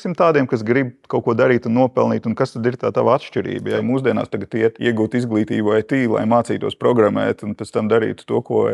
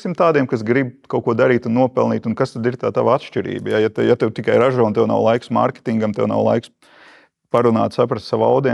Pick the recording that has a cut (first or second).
first